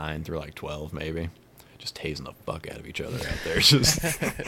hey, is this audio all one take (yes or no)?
yes